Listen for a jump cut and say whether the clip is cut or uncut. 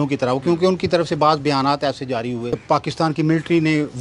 cut